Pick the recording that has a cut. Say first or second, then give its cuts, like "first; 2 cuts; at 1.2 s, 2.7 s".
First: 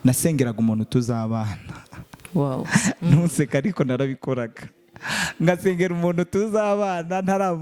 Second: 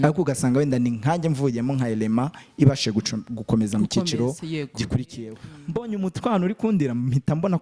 second; 1 cut; at 5.3 s